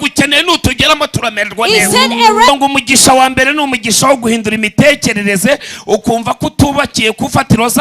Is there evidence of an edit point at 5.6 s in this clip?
no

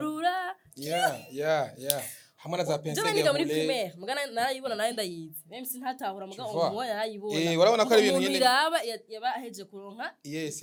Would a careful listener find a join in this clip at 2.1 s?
no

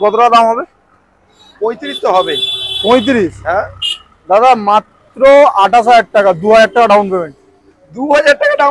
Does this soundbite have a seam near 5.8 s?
no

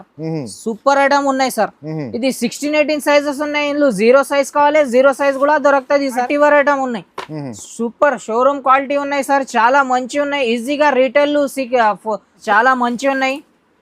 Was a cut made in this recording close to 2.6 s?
no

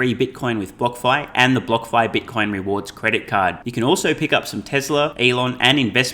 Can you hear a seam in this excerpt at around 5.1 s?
yes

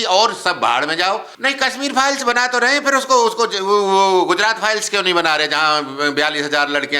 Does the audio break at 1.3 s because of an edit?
yes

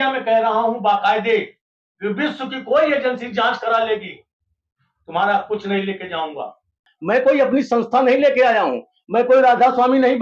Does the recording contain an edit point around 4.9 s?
no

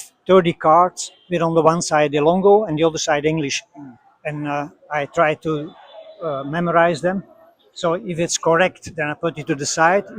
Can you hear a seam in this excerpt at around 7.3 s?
no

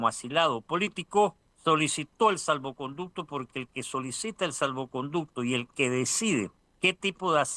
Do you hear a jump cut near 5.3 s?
no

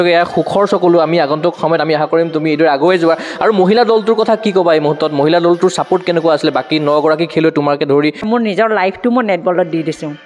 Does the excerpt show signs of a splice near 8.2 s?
yes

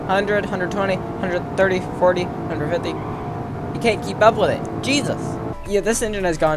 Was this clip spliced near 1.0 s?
no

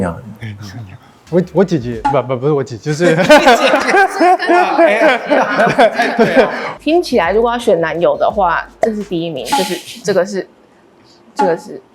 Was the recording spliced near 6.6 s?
yes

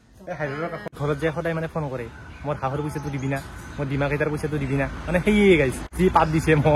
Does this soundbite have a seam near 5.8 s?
yes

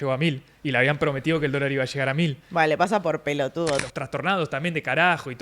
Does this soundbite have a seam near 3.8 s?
yes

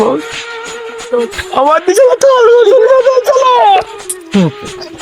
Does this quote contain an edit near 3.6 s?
no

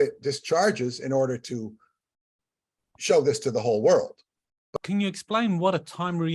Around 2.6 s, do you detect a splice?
no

